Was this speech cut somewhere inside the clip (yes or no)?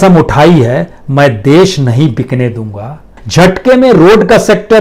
yes